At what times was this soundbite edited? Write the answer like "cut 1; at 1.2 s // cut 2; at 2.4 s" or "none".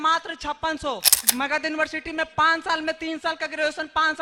cut 1; at 1.1 s